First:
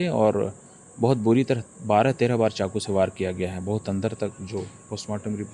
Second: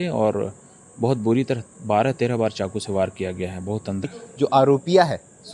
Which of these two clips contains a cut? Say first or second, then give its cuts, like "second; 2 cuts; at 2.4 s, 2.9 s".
second; 1 cut; at 4.1 s